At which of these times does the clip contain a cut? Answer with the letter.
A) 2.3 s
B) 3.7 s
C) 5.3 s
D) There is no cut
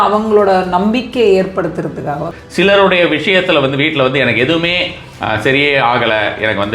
A